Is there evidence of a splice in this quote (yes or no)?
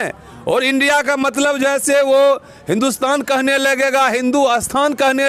no